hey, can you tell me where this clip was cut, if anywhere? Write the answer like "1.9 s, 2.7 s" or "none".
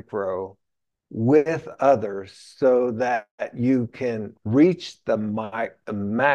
none